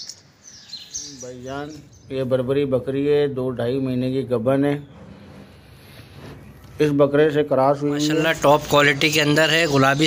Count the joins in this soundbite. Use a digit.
2